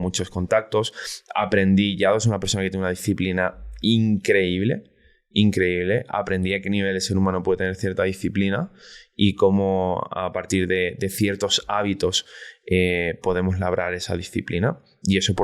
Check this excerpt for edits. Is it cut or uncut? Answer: uncut